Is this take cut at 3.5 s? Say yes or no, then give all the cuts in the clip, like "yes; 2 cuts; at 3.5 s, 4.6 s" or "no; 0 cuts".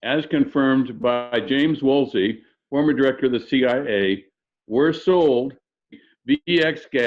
no; 1 cut; at 5.9 s